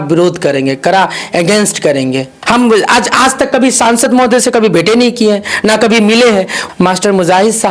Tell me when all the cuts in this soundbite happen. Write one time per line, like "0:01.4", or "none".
0:02.3
0:06.6